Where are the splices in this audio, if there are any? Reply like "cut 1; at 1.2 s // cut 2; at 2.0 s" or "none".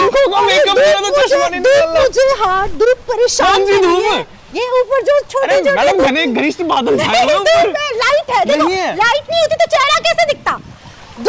none

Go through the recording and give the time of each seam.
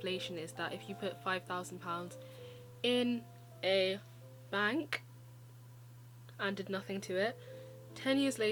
none

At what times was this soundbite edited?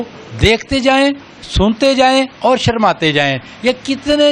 none

